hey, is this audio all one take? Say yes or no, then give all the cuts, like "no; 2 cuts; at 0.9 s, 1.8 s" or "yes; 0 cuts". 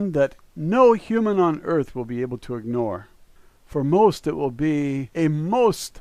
yes; 0 cuts